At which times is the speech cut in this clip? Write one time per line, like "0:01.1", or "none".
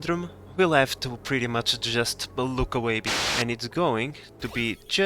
0:03.1

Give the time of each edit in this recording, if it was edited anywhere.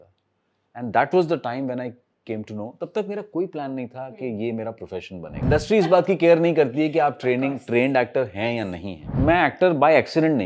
0:05.4
0:09.1

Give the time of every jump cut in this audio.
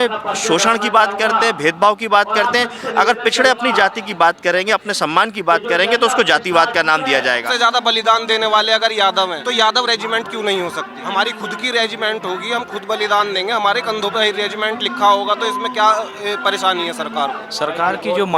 0:07.5
0:09.4
0:11.0
0:17.5

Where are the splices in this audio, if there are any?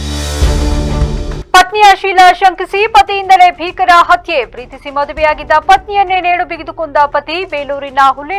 0:01.4

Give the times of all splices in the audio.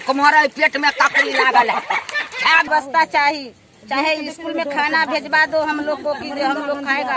0:02.7

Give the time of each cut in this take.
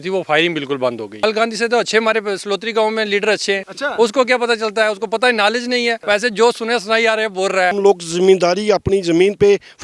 0:01.2
0:03.8
0:06.0
0:07.7

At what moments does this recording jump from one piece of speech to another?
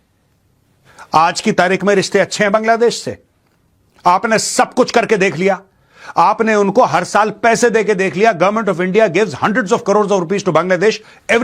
none

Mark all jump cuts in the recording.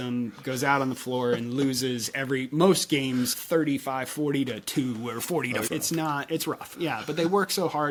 none

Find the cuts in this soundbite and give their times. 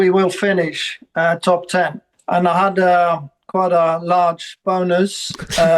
0:02.1

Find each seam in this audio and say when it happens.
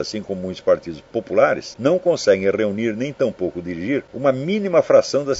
0:01.7
0:04.1

